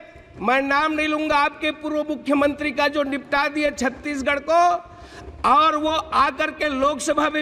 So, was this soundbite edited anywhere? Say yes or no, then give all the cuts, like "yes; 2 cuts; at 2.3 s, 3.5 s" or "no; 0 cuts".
no; 0 cuts